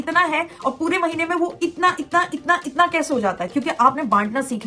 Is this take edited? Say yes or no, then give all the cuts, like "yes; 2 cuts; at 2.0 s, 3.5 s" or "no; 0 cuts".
no; 0 cuts